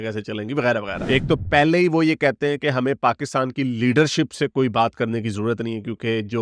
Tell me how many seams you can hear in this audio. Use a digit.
1